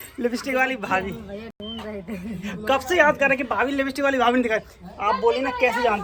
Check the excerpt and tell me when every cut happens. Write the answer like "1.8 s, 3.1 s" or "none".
none